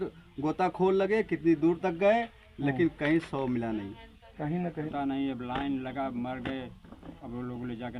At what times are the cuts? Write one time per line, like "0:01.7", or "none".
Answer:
0:04.9